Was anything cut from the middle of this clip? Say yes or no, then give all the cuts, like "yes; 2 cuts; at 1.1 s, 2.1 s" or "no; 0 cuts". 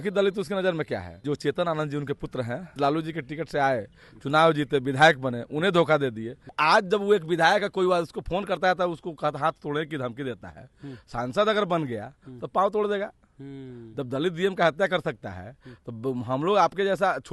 yes; 3 cuts; at 1.2 s, 2.6 s, 6.5 s